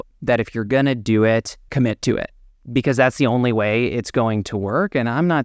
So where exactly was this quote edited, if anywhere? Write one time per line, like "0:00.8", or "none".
0:01.6
0:02.5

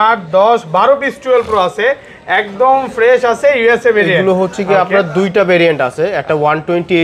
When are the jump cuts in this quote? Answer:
none

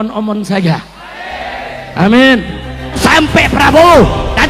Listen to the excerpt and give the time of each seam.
0:03.0

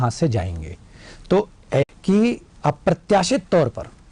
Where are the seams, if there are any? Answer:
0:01.9

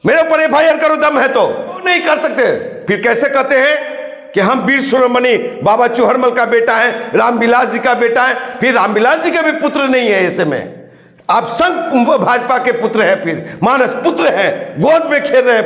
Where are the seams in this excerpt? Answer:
0:01.8

